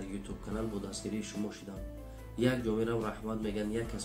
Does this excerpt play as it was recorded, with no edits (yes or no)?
yes